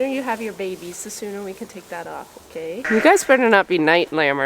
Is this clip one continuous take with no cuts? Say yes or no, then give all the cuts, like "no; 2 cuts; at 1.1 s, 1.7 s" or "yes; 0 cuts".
no; 1 cut; at 2.8 s